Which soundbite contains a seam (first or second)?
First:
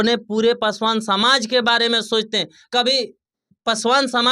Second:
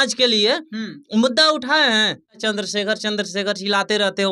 second